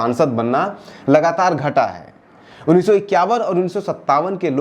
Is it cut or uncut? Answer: uncut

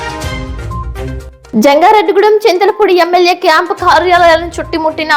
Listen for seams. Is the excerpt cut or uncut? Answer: cut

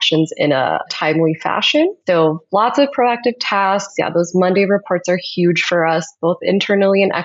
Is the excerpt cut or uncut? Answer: cut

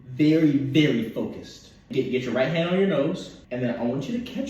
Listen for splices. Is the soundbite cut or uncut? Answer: cut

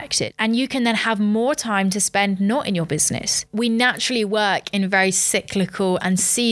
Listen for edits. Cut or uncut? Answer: cut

